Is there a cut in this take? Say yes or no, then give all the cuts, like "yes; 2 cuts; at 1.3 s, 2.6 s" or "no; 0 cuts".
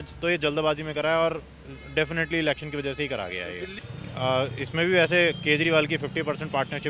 yes; 1 cut; at 3.7 s